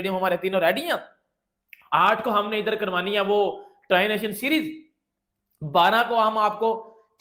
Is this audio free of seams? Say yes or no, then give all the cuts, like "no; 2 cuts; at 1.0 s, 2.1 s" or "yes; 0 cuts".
yes; 0 cuts